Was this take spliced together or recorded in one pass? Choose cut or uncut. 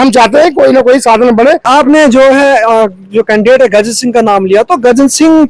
cut